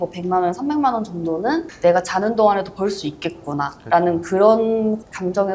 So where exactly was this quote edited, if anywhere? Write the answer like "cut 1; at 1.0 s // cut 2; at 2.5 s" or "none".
none